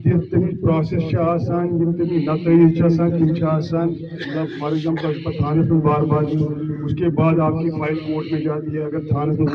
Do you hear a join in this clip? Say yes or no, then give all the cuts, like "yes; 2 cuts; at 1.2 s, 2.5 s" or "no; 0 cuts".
no; 0 cuts